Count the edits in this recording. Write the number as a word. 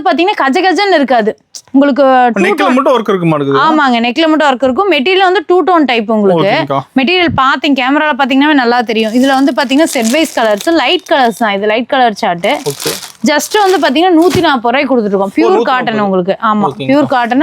zero